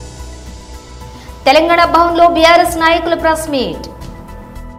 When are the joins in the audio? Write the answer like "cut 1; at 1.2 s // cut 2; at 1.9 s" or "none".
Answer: none